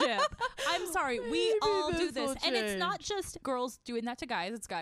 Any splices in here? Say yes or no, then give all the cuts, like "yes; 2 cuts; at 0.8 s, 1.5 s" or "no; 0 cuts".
yes; 1 cut; at 3.4 s